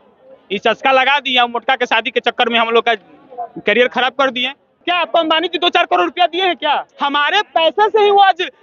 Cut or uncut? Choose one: cut